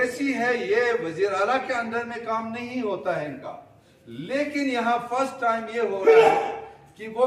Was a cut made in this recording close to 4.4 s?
no; 0 cuts

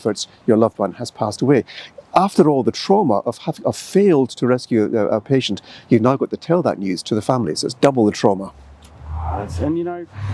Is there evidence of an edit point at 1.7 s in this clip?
no; 0 cuts

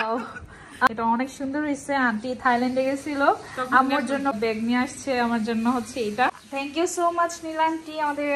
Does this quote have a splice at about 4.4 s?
yes; 3 cuts; at 0.9 s, 4.4 s, 6.4 s

